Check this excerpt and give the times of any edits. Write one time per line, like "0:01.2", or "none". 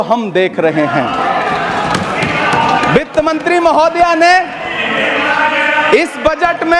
none